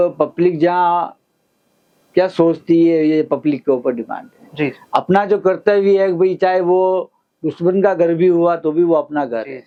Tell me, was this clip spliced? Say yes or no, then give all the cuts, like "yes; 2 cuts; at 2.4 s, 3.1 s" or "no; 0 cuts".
no; 0 cuts